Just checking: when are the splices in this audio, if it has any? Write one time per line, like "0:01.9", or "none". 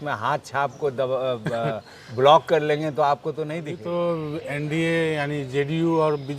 0:03.7